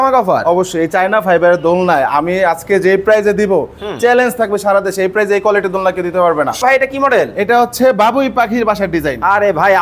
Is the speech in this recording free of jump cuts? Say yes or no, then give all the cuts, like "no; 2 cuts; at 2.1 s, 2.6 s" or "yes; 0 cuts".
no; 1 cut; at 6.6 s